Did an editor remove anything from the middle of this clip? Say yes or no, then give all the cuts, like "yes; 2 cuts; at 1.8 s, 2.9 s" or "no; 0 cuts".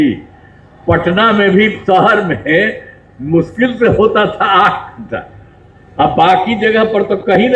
no; 0 cuts